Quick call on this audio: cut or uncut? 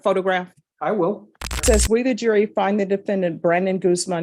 cut